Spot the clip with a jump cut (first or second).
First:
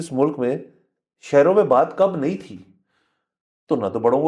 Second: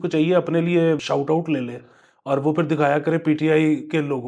second